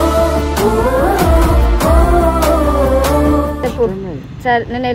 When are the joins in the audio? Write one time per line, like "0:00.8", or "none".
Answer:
none